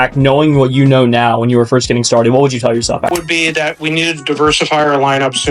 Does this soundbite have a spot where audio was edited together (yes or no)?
yes